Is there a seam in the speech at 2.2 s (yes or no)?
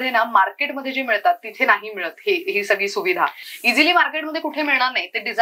no